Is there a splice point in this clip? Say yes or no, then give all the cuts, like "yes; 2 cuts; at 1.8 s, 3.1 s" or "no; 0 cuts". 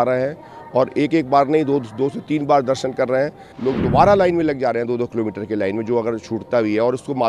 yes; 1 cut; at 3.4 s